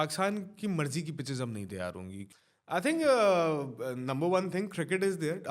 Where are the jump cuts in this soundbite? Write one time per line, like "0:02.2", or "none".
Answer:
0:02.2